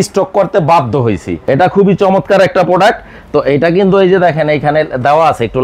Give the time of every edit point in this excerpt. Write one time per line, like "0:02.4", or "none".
0:01.3